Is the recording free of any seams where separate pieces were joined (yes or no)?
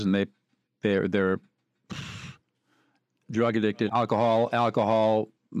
no